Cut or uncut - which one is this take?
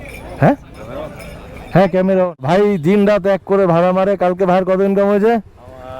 cut